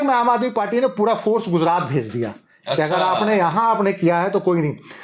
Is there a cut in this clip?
no; 0 cuts

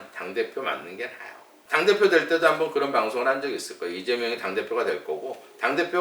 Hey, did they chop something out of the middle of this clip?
no; 0 cuts

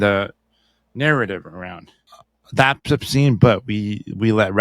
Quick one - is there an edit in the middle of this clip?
yes; 1 cut; at 1.5 s

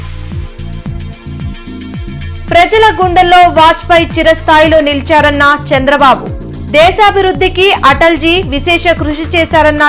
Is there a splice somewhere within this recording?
no; 0 cuts

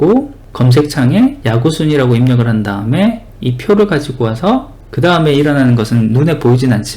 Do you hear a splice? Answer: yes; 1 cut; at 1.4 s

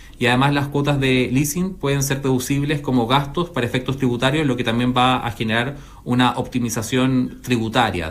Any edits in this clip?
no; 0 cuts

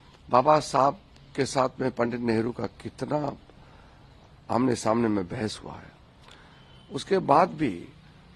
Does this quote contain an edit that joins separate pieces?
no; 0 cuts

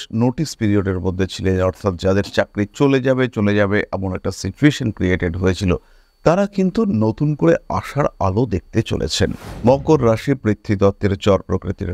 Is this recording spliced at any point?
no; 0 cuts

